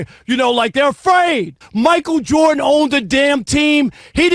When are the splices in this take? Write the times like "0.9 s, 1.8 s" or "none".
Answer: 1.6 s

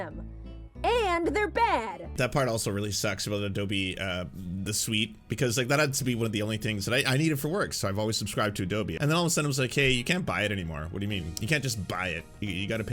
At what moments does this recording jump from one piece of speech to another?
2.1 s, 8.9 s

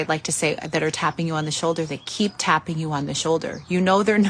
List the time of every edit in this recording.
none

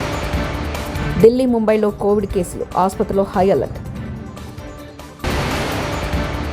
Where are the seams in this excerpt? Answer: 1.0 s

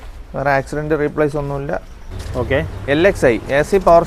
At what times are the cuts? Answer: 2.1 s

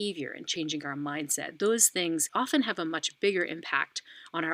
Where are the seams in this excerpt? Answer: 2.3 s

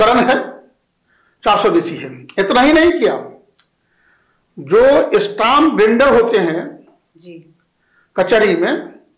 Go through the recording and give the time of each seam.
none

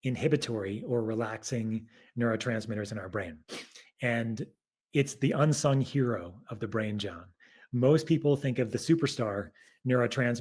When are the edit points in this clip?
none

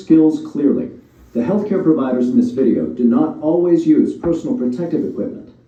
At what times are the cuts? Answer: none

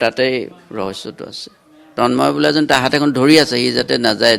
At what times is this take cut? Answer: 1.8 s

